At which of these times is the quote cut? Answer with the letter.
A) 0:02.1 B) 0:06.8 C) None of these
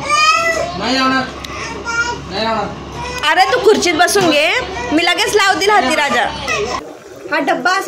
B